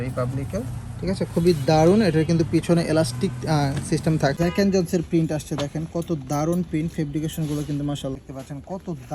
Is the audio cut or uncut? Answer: cut